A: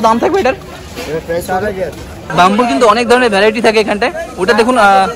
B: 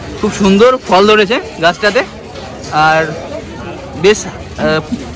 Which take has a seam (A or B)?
A